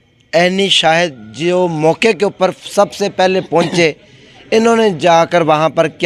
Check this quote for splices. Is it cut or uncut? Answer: uncut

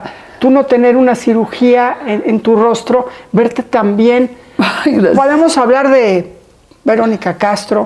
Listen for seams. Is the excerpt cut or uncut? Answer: uncut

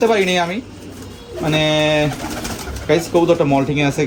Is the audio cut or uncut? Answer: uncut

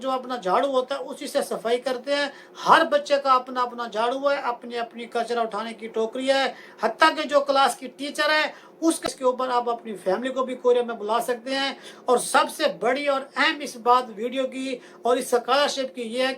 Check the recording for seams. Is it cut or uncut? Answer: cut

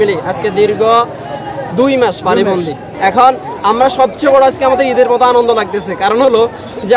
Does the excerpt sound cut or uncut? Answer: uncut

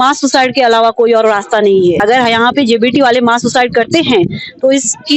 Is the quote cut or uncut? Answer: cut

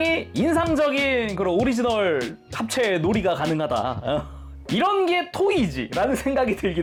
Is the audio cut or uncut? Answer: uncut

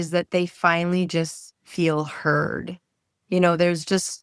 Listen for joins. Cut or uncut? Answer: uncut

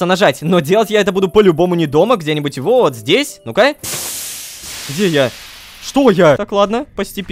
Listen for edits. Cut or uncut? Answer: cut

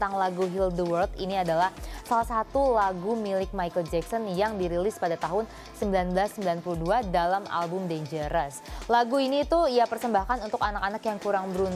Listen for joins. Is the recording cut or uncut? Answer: uncut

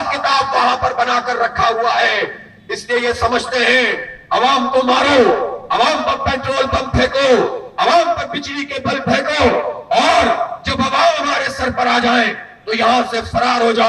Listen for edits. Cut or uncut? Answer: uncut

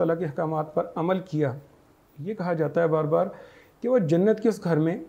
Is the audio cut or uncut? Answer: uncut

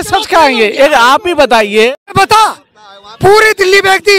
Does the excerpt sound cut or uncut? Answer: cut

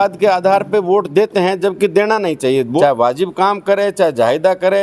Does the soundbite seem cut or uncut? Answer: cut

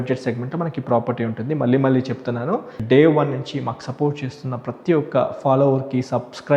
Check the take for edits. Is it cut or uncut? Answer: cut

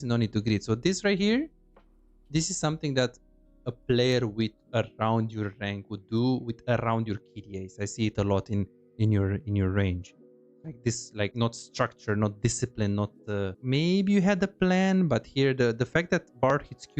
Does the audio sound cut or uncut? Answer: cut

